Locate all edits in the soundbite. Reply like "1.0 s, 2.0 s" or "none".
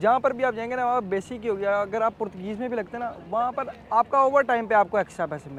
none

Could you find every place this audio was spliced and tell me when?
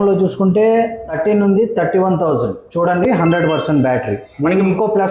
1.0 s, 2.6 s, 4.3 s

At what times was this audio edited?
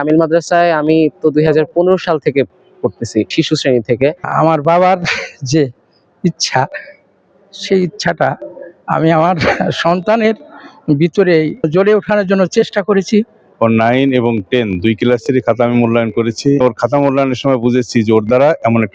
4.3 s, 11.7 s, 13.4 s, 16.6 s

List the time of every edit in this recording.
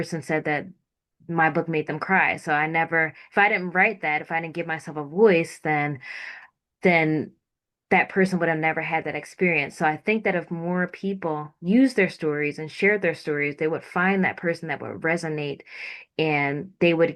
none

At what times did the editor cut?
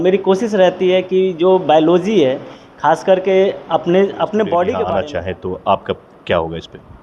4.8 s

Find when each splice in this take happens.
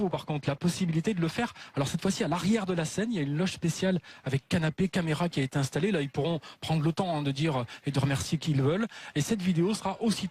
none

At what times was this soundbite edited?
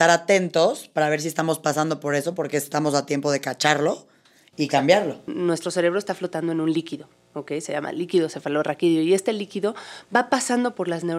5.2 s

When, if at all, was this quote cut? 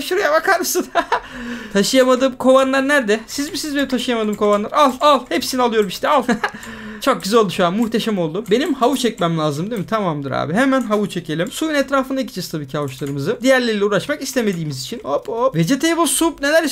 none

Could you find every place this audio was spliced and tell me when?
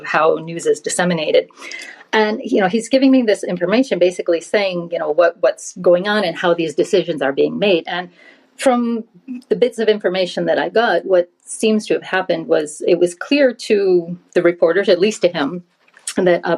none

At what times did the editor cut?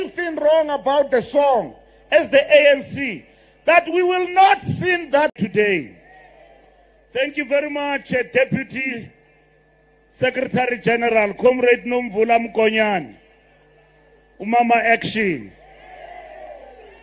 5.4 s

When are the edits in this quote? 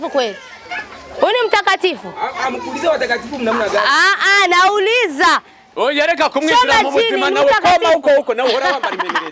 none

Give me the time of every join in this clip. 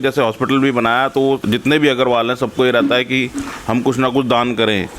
1.4 s

